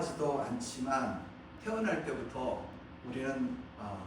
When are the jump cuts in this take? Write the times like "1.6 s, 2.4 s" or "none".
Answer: 1.5 s, 2.8 s